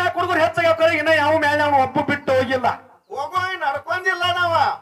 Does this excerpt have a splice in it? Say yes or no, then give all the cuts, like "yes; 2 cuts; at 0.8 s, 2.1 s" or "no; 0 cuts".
no; 0 cuts